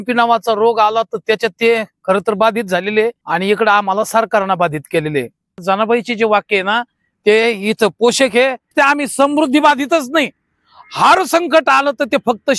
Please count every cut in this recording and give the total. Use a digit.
3